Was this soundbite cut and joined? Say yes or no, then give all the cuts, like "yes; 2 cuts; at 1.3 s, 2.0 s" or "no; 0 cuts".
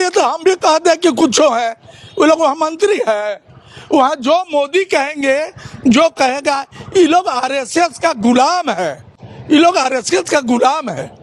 no; 0 cuts